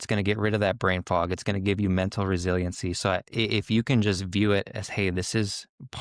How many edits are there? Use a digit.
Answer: 0